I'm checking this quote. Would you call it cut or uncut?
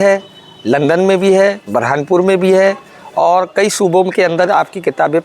uncut